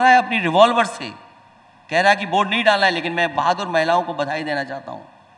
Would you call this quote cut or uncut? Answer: uncut